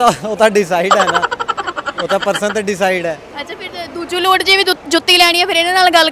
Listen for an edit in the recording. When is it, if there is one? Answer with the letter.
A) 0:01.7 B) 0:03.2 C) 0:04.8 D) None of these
D